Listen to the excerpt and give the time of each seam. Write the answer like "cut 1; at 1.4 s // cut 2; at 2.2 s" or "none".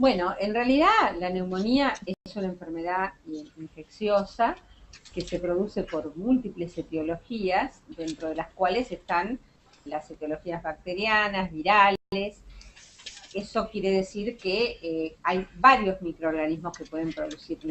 cut 1; at 13.5 s

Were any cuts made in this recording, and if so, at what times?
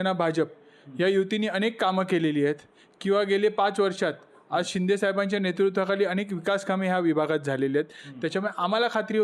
none

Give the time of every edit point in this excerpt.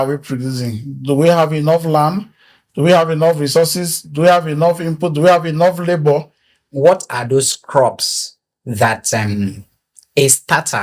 cut 1; at 6.7 s

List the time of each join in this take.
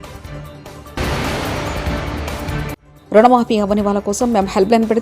cut 1; at 1.0 s // cut 2; at 2.9 s

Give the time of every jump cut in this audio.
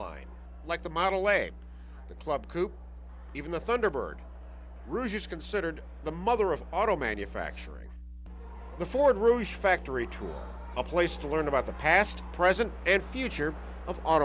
cut 1; at 8.3 s

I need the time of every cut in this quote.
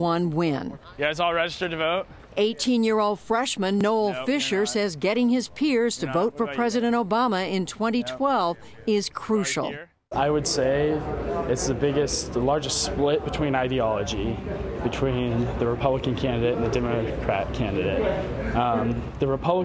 cut 1; at 17.7 s

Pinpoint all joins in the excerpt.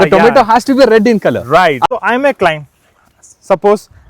cut 1; at 1.9 s

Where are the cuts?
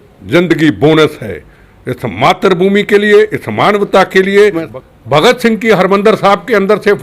cut 1; at 4.7 s

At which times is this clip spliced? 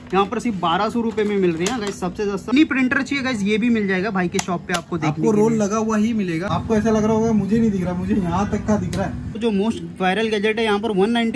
cut 1; at 2.5 s // cut 2; at 6.5 s // cut 3; at 9.3 s

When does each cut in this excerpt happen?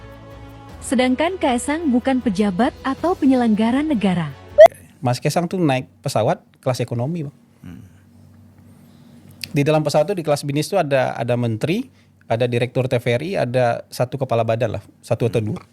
cut 1; at 4.7 s

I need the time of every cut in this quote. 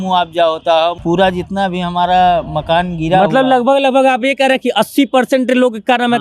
cut 1; at 1.0 s

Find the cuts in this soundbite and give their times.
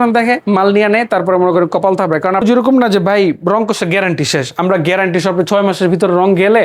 cut 1; at 2.4 s

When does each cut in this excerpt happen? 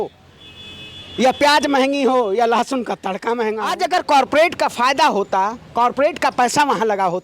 cut 1; at 3.8 s

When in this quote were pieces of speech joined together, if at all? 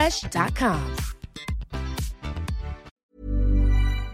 cut 1; at 2.9 s

